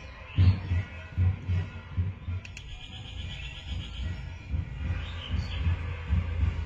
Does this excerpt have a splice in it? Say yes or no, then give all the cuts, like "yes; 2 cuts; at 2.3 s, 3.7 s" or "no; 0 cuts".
no; 0 cuts